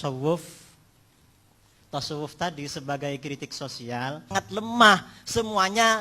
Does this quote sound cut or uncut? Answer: cut